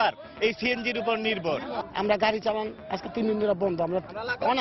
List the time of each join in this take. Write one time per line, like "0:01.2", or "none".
0:01.8